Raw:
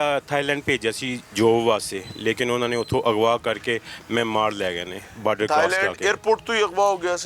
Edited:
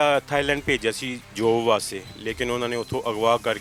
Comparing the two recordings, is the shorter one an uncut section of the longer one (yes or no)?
yes